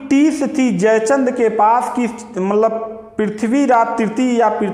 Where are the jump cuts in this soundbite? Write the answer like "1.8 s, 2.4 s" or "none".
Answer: none